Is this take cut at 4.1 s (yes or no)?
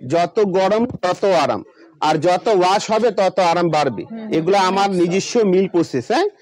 no